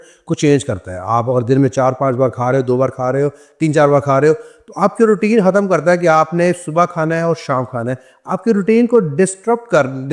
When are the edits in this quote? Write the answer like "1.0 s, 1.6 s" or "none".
none